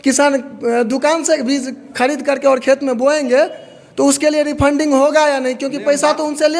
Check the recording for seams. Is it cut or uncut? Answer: uncut